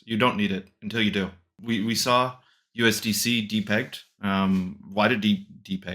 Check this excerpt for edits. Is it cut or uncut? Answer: cut